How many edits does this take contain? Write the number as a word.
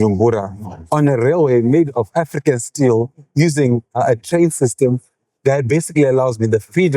one